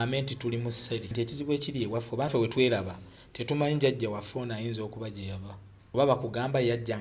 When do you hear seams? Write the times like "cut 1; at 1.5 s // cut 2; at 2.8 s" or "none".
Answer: cut 1; at 1.1 s // cut 2; at 2.3 s // cut 3; at 5.7 s